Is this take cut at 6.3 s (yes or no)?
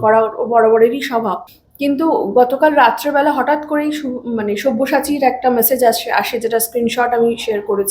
no